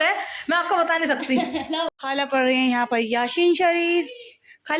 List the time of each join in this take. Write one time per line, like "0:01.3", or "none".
0:02.0